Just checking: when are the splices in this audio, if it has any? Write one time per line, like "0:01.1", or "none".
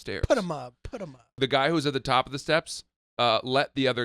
0:01.4

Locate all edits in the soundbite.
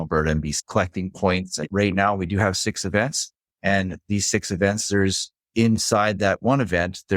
0:01.6

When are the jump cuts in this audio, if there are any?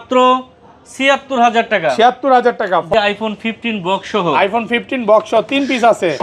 0:02.9

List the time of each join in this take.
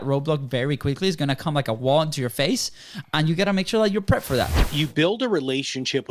0:04.5

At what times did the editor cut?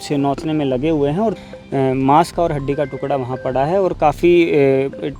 0:01.3

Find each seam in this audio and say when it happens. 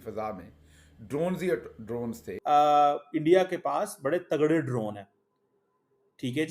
0:02.3

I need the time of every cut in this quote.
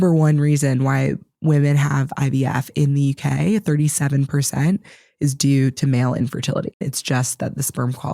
0:06.8

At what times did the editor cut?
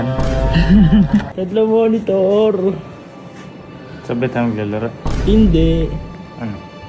0:01.3

